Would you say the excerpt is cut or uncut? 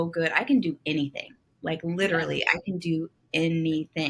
uncut